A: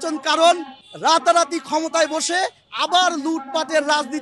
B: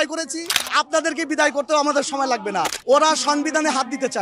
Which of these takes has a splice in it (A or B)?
B